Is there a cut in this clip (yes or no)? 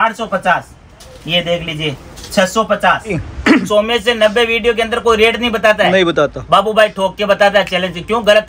yes